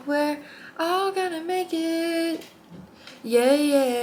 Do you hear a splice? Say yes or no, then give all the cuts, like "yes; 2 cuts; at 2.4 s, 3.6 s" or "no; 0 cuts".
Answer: no; 0 cuts